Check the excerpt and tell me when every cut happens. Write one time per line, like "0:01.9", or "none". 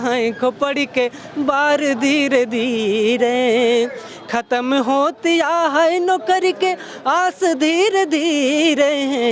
none